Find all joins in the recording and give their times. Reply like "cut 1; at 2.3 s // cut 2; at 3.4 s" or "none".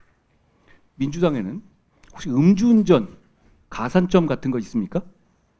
none